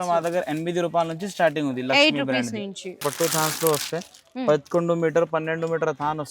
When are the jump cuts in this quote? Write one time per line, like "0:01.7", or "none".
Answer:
0:03.0